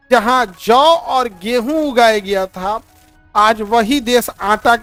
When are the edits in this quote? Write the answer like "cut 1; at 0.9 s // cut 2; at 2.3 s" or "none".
none